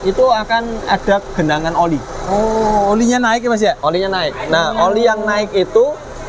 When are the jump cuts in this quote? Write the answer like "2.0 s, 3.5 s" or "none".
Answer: none